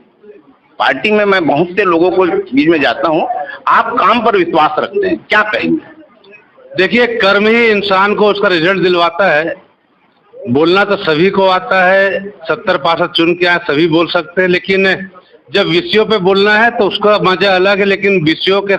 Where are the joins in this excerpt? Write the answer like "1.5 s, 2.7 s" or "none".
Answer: none